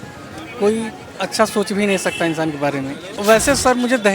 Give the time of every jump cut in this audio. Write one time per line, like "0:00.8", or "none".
0:03.1

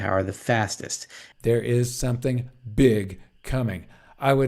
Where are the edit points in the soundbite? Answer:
0:01.1

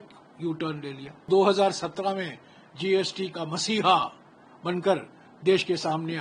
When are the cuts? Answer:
0:01.3

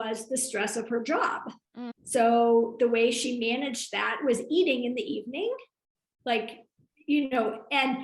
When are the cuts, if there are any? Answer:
0:01.9

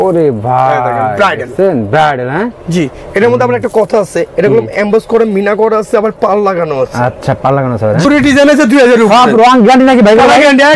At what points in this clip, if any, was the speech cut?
0:08.0

